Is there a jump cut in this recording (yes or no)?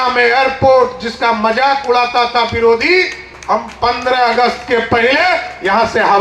no